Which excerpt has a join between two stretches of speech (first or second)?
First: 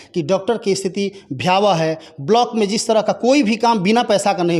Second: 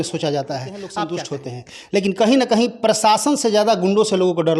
second